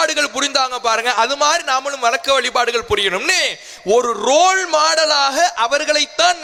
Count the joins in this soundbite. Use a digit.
0